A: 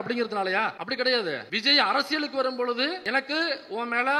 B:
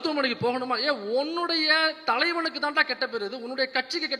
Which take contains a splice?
A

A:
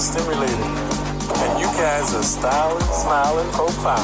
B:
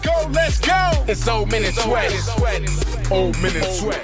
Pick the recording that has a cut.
B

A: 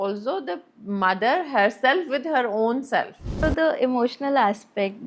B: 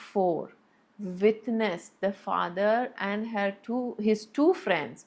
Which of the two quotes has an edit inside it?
A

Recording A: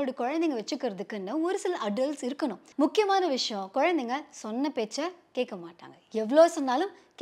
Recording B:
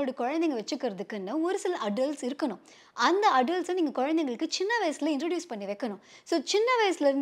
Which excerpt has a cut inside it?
A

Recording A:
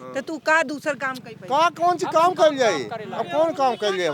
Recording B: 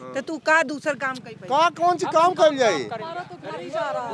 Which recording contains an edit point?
B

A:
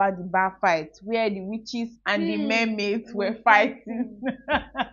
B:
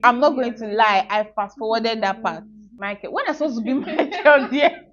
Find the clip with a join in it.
B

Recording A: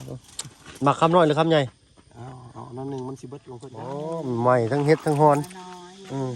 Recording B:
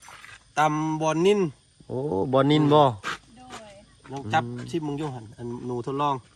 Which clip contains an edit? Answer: A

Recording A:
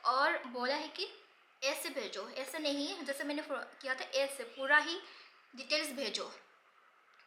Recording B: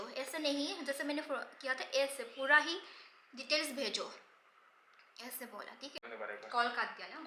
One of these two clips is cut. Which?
B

